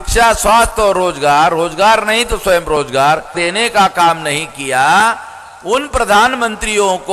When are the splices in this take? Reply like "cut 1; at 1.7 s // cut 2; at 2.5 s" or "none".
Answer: cut 1; at 3.4 s